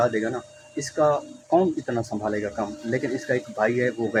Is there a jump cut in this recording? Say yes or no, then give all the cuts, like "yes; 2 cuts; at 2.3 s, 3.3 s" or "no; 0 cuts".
no; 0 cuts